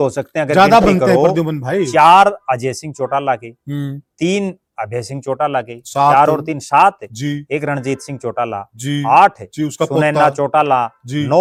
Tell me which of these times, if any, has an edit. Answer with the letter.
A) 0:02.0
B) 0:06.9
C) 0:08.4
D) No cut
D